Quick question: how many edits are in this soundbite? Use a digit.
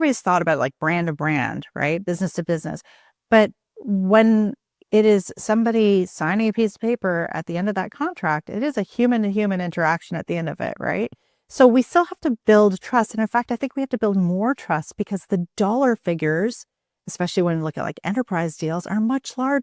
0